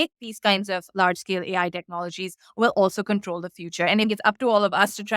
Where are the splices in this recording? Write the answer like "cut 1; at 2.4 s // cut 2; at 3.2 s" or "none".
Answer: cut 1; at 4.1 s